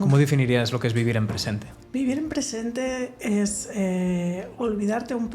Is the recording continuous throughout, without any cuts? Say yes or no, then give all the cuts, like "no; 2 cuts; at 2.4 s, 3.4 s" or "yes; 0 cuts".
no; 1 cut; at 1.7 s